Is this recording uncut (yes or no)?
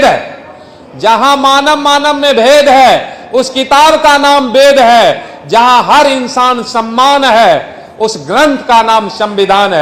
yes